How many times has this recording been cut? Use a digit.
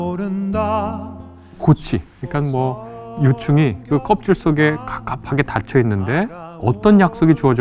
2